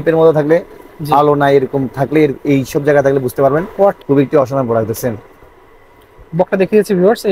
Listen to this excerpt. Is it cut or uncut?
cut